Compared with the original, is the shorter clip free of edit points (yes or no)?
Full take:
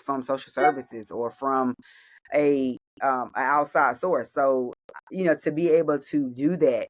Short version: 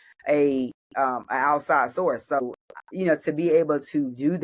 no